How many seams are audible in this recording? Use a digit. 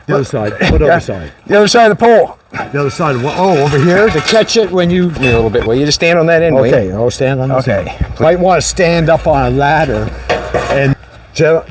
3